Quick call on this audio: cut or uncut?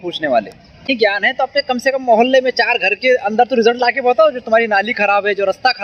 cut